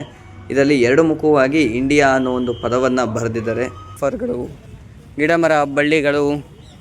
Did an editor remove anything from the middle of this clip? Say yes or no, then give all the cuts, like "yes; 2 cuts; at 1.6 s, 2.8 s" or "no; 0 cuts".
yes; 1 cut; at 4.0 s